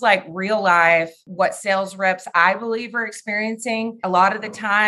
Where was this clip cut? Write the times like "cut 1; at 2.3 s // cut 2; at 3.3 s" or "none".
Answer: cut 1; at 1.2 s // cut 2; at 4.0 s